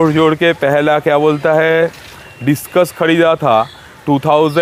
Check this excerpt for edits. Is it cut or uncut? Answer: uncut